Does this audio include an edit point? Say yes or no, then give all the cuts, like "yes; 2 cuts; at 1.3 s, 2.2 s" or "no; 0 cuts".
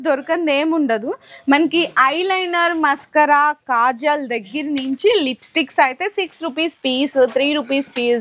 no; 0 cuts